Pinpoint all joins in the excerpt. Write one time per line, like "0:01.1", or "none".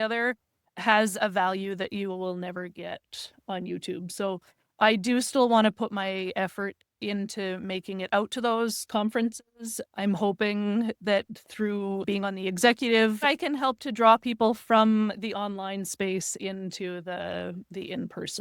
0:12.0
0:13.2